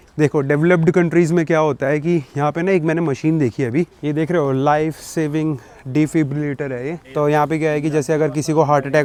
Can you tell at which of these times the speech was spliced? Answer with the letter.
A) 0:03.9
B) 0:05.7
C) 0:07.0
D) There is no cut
D